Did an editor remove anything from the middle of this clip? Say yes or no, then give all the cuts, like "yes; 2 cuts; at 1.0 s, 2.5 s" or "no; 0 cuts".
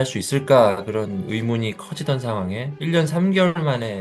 no; 0 cuts